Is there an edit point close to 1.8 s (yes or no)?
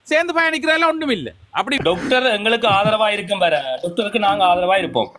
yes